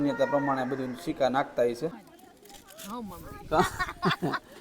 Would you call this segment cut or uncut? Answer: cut